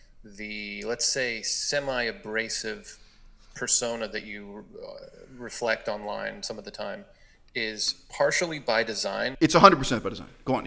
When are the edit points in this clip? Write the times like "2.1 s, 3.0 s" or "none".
9.3 s